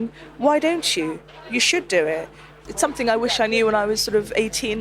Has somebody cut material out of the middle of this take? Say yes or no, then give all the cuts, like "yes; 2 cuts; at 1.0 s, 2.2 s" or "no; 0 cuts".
yes; 1 cut; at 2.6 s